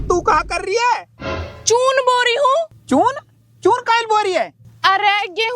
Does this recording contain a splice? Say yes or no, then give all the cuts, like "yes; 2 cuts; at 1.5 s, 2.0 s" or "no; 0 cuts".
yes; 1 cut; at 2.8 s